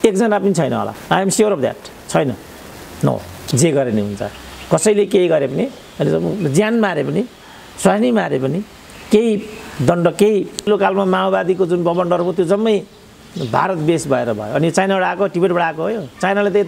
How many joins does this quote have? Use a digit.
3